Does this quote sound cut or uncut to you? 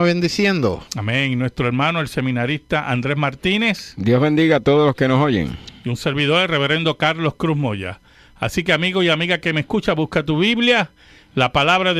cut